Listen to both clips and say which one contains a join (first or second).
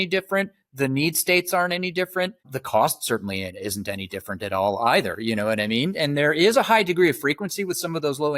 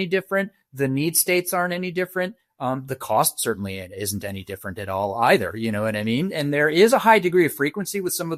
first